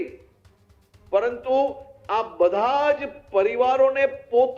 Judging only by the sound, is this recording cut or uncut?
uncut